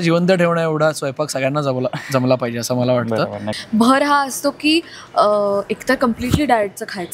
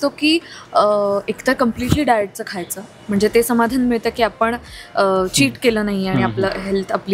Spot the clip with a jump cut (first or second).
first